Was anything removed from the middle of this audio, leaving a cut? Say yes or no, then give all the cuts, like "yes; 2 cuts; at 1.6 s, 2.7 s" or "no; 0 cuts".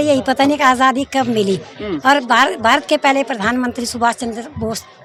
no; 0 cuts